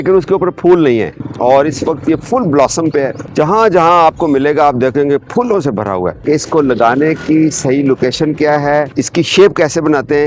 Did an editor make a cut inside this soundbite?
yes; 3 cuts; at 1.2 s, 6.2 s, 8.9 s

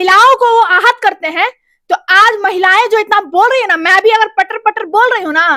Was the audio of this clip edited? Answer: no; 0 cuts

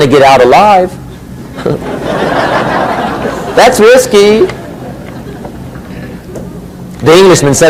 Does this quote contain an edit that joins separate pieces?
no; 0 cuts

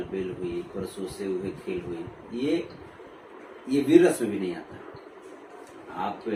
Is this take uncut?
yes; 0 cuts

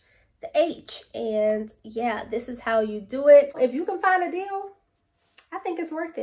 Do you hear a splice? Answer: yes; 1 cut; at 3.6 s

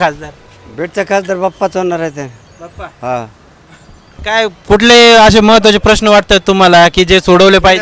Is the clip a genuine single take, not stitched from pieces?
yes; 0 cuts

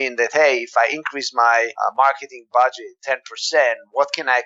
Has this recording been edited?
yes; 2 cuts; at 1.7 s, 2.9 s

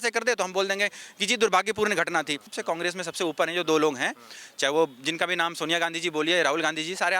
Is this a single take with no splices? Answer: no; 1 cut; at 2.5 s

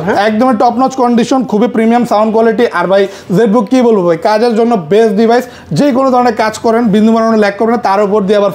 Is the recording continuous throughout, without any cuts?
yes; 0 cuts

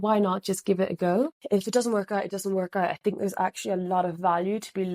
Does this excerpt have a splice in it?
yes; 1 cut; at 1.4 s

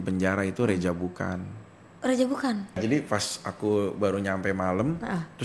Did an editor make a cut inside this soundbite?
yes; 1 cut; at 2.8 s

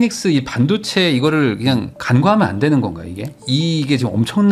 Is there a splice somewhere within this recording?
no; 0 cuts

